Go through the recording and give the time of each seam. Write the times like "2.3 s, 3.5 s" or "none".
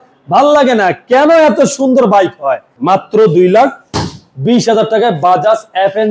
2.7 s